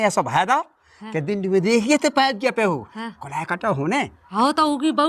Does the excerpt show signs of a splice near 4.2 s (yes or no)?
yes